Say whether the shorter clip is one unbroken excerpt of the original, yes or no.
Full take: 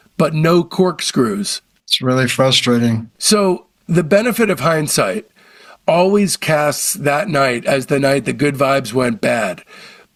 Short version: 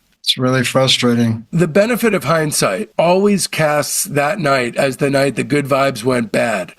no